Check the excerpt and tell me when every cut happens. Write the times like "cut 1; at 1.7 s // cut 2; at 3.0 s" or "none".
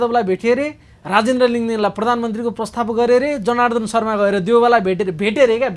none